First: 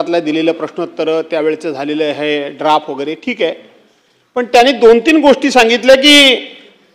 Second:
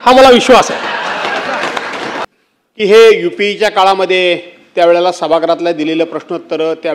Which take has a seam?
second; 1 cut; at 2.2 s

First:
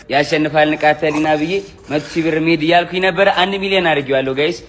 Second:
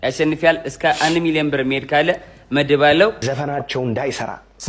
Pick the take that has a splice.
second; 1 cut; at 3.2 s

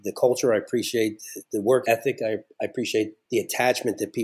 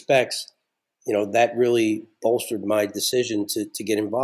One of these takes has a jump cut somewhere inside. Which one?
first; 2 cuts; at 1.8 s, 3.2 s

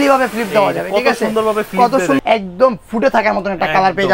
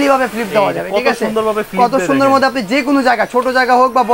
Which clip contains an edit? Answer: first; 1 cut; at 2.2 s

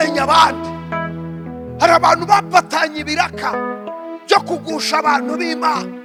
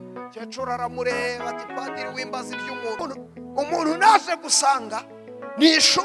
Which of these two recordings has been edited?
second; 1 cut; at 3.0 s

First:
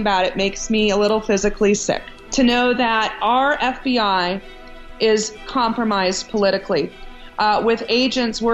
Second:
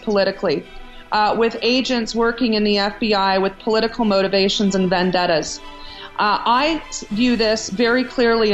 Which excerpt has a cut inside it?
first; 1 cut; at 2.1 s

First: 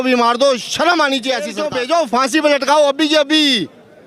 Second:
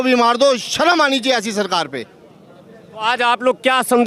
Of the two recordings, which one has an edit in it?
first; 1 cut; at 1.6 s

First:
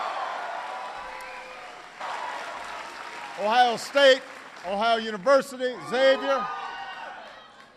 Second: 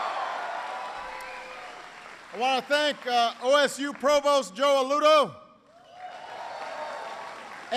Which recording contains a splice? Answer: second; 1 cut; at 2.1 s

